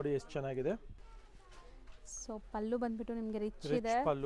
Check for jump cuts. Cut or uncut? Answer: cut